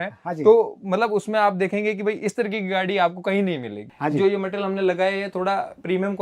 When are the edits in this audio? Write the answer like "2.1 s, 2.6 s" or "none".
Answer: 3.8 s